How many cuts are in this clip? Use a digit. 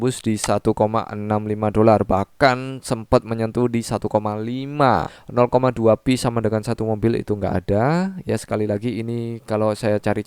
1